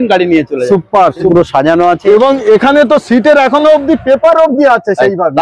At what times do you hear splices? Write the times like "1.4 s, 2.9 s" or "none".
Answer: 1.3 s